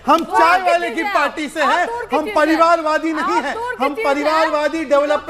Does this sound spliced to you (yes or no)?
no